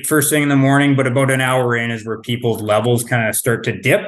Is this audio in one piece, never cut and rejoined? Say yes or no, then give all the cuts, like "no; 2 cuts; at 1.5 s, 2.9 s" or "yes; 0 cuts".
yes; 0 cuts